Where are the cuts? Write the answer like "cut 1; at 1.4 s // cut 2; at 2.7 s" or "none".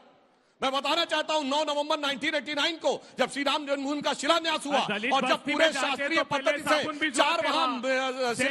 none